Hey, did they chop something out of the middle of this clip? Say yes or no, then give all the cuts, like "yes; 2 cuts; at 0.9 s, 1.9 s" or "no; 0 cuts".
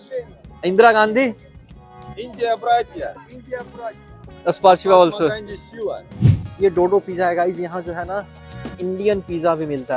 yes; 1 cut; at 6.5 s